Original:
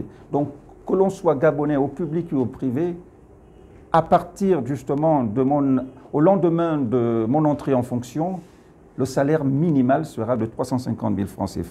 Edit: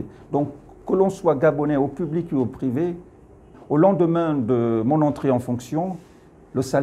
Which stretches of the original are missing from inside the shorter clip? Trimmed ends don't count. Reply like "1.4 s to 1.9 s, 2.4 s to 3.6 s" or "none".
3.5 s to 6.0 s